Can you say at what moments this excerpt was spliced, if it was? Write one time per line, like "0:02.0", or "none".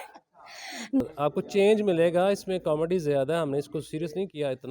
0:01.0